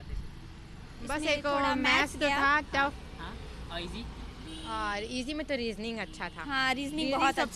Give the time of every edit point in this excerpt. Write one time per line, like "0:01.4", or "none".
none